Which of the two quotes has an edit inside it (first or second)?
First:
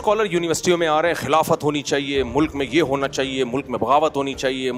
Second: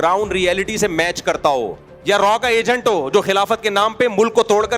second